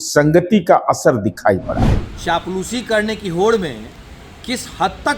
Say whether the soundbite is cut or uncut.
cut